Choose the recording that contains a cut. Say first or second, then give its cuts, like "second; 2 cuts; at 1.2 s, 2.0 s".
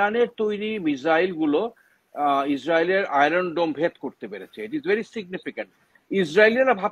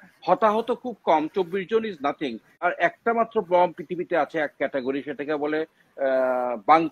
second; 1 cut; at 2.5 s